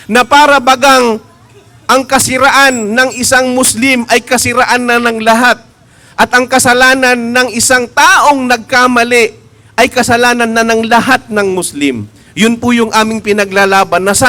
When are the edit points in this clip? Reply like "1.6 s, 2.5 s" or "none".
none